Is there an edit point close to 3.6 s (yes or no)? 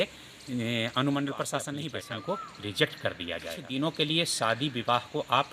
yes